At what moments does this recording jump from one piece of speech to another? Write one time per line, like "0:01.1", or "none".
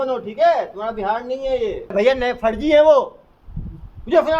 0:01.9